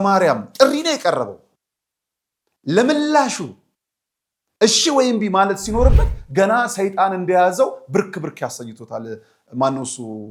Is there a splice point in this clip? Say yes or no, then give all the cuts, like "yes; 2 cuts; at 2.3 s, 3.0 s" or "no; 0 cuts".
no; 0 cuts